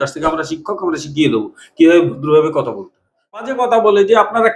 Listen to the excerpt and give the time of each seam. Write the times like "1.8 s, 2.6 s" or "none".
3.4 s